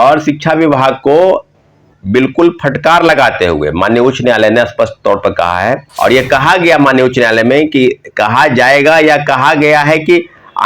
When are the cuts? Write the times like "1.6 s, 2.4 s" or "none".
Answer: 5.9 s